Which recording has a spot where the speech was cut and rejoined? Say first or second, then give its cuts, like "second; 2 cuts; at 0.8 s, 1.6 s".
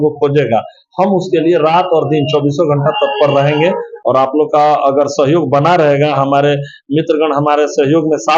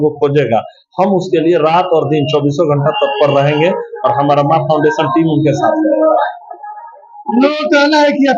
first; 1 cut; at 3.9 s